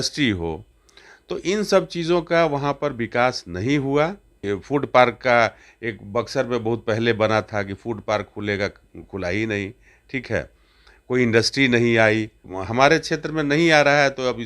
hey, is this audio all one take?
no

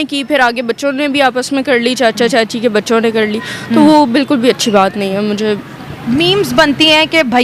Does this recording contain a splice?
no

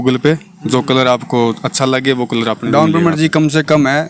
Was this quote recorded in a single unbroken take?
no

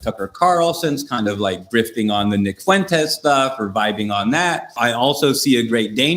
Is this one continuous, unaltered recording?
no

